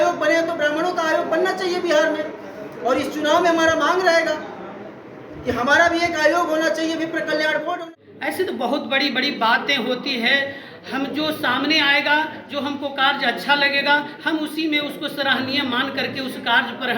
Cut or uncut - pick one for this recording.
cut